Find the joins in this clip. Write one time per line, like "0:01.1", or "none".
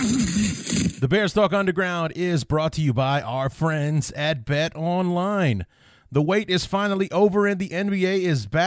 0:01.0